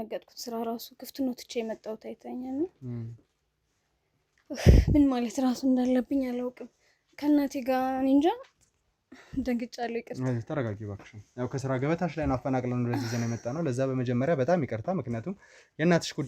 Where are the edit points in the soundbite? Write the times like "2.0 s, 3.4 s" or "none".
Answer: none